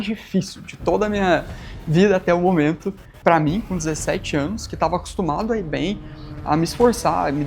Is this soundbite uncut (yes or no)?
no